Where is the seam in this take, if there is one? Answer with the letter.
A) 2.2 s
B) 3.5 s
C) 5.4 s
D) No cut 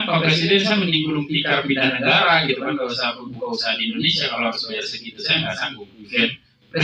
D